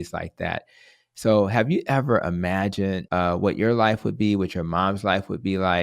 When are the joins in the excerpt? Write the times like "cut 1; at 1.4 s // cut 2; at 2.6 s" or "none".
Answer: cut 1; at 3.0 s